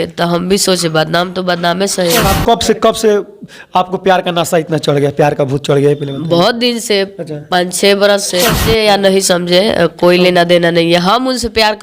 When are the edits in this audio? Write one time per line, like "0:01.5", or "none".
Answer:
0:02.2
0:08.6